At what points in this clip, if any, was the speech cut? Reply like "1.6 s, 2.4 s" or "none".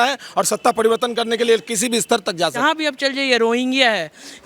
2.6 s